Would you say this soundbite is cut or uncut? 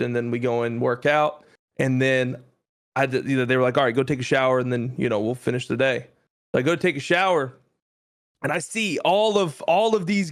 uncut